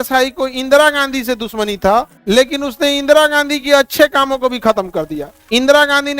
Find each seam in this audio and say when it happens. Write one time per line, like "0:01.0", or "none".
0:02.1
0:05.3